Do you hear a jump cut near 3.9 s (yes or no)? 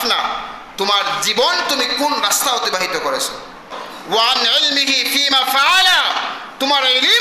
yes